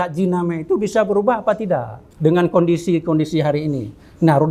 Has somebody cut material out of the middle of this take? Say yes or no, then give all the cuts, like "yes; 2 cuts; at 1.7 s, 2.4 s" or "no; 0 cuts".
no; 0 cuts